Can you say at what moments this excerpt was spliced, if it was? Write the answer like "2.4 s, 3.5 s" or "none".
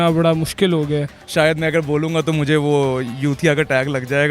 1.2 s

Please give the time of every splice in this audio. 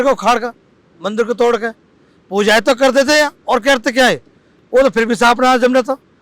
none

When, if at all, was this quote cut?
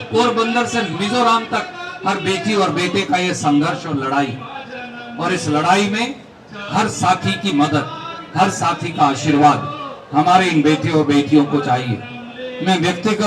none

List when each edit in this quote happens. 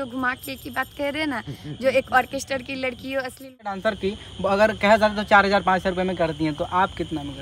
3.8 s

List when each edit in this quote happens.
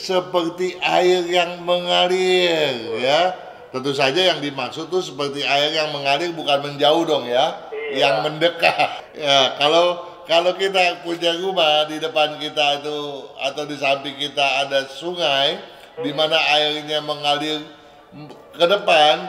9.0 s

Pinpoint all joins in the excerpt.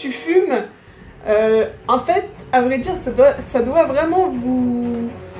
none

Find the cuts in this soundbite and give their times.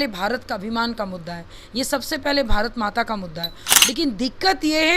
3.6 s

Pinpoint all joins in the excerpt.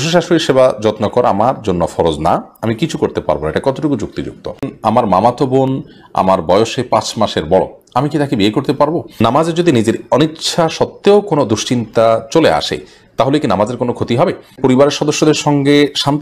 4.7 s, 9.1 s, 14.6 s

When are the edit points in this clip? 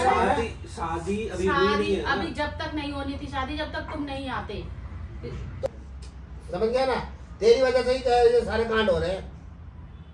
5.7 s

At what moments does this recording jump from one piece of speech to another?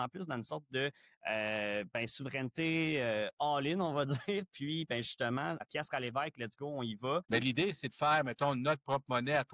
5.6 s, 7.3 s

